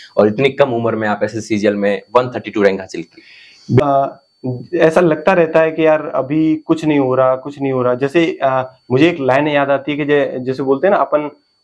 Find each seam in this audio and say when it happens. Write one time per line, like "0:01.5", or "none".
0:03.8